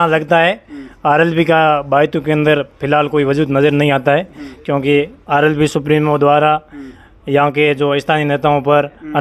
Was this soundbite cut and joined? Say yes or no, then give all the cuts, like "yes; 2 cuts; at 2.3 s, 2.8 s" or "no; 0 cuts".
no; 0 cuts